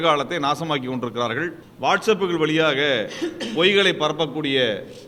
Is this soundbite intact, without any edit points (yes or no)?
no